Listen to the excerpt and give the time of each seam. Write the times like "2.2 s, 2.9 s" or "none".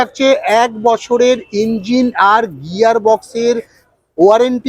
none